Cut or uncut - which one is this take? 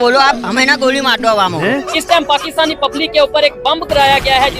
cut